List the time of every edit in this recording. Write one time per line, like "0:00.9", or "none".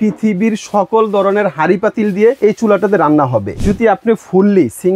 0:02.4
0:03.6